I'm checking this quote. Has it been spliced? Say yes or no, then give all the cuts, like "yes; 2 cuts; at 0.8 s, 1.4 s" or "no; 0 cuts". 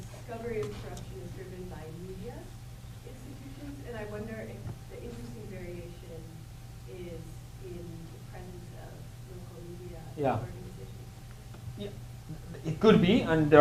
no; 0 cuts